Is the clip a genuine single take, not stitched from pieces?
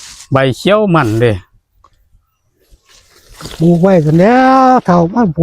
yes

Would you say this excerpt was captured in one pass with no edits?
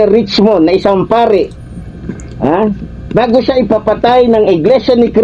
yes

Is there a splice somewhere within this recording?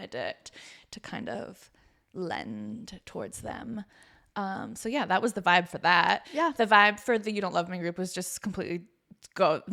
no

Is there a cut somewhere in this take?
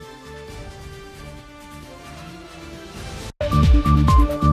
no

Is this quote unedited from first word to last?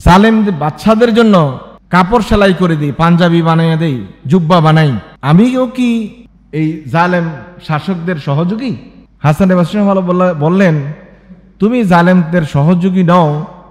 yes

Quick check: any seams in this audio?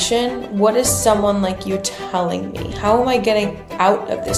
no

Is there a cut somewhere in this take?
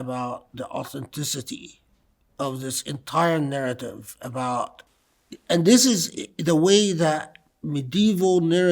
yes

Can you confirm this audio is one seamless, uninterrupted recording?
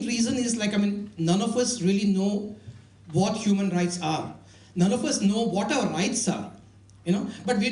no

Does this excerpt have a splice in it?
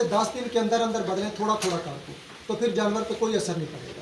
no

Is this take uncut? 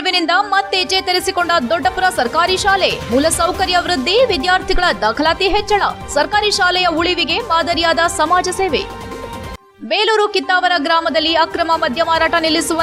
yes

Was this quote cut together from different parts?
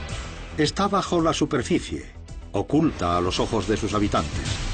yes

